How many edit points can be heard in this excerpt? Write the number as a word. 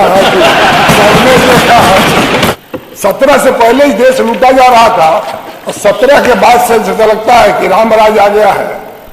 one